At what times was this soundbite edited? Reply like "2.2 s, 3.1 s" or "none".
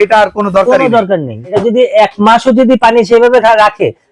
1.5 s